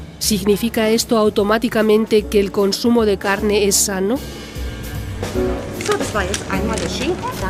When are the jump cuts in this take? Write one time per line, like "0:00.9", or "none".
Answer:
none